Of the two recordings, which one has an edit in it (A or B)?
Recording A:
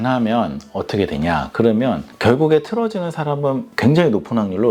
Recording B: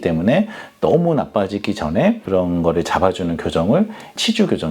B